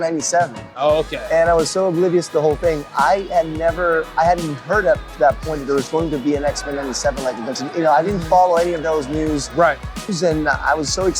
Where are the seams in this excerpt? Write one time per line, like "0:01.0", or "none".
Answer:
0:10.1